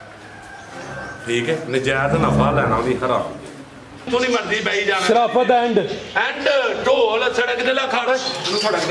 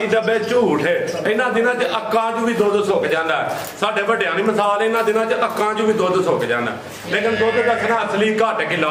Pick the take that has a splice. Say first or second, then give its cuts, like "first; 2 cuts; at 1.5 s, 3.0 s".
first; 1 cut; at 4.1 s